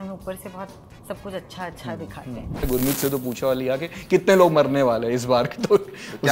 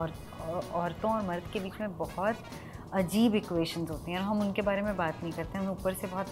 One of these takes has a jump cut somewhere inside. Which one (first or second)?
first